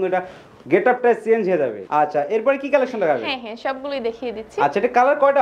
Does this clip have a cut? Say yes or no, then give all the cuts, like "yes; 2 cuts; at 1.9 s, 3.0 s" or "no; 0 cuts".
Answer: no; 0 cuts